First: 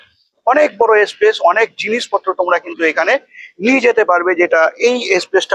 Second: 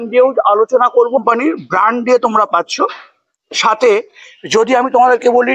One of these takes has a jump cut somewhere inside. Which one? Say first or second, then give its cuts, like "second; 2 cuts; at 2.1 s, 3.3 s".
second; 1 cut; at 1.2 s